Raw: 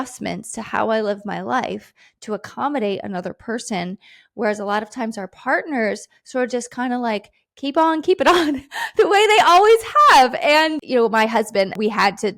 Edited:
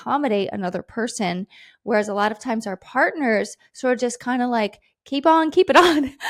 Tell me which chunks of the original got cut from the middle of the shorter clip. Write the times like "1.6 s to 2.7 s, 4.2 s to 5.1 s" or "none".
none